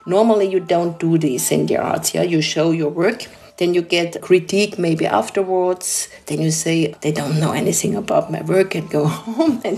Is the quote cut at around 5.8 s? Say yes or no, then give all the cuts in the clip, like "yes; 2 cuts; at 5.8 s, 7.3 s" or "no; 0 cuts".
no; 0 cuts